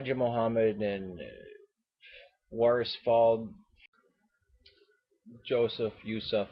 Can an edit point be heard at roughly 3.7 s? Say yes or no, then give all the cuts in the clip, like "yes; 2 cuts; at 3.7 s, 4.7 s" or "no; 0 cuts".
no; 0 cuts